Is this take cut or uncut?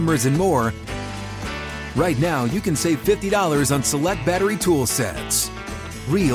uncut